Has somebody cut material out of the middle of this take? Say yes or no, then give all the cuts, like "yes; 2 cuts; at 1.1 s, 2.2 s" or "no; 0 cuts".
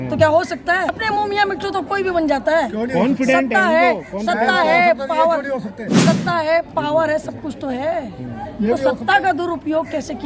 yes; 1 cut; at 1.0 s